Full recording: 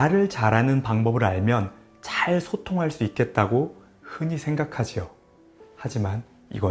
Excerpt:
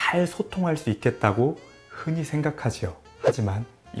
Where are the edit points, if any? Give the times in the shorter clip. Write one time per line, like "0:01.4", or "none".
0:03.1